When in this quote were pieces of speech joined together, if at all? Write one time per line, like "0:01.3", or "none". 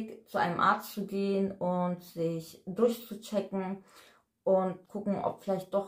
0:04.9